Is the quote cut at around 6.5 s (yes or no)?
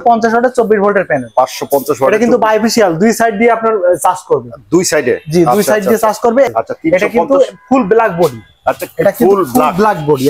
yes